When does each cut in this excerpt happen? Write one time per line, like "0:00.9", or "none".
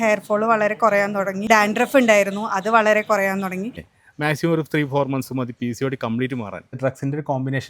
0:01.5
0:03.9
0:06.8